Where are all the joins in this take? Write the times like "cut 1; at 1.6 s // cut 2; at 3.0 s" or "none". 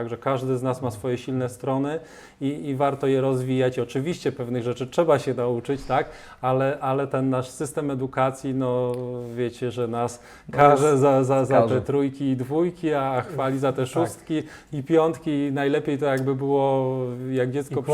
none